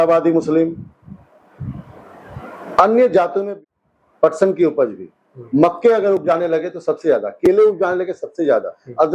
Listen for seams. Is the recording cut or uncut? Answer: cut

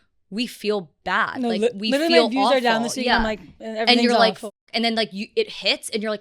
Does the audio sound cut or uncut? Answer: uncut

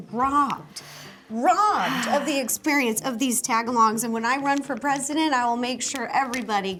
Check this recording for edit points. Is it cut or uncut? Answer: uncut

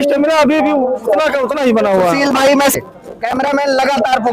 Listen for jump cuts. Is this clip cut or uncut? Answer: cut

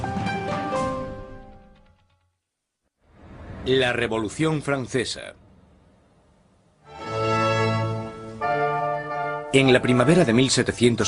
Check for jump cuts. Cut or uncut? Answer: uncut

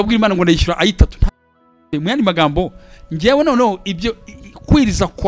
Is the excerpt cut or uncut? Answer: cut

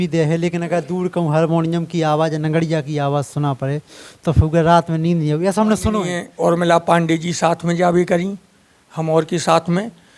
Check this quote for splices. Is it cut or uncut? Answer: cut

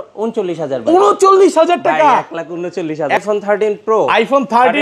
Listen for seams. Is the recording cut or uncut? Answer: cut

